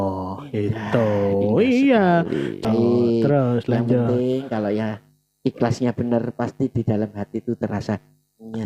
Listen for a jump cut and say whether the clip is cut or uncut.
cut